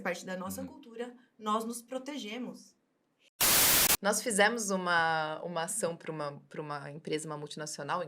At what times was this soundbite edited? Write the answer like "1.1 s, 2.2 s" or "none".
3.6 s